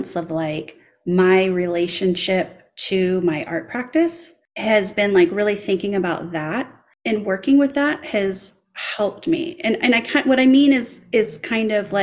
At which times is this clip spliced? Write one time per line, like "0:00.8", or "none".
none